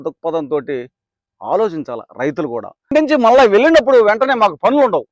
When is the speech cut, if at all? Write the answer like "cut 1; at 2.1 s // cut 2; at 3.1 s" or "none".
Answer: cut 1; at 2.9 s